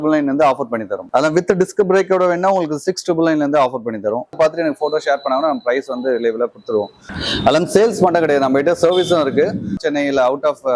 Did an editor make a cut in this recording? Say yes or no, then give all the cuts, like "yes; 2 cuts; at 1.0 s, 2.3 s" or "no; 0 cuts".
yes; 4 cuts; at 1.1 s, 4.3 s, 7.0 s, 9.8 s